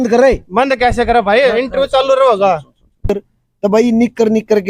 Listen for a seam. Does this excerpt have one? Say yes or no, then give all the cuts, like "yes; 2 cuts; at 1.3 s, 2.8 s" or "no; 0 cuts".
yes; 1 cut; at 3.0 s